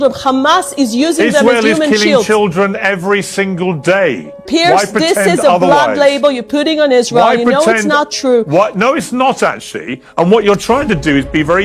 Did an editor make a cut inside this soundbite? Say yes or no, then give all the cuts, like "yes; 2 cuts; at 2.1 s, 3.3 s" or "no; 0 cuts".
no; 0 cuts